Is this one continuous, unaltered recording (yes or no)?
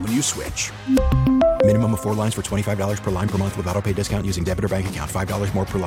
yes